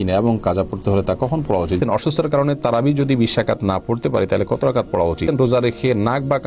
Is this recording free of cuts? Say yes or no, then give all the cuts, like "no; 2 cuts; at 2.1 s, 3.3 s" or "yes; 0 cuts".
no; 2 cuts; at 1.7 s, 5.3 s